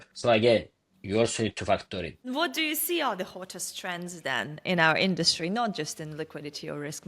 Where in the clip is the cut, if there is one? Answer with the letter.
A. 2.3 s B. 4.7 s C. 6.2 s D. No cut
A